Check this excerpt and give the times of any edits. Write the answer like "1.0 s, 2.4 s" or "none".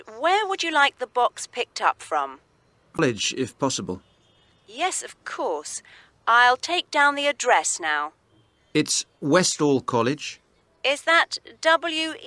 3.0 s